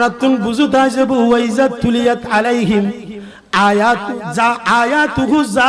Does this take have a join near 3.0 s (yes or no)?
no